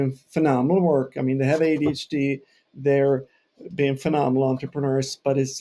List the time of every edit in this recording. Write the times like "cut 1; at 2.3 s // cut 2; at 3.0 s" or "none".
none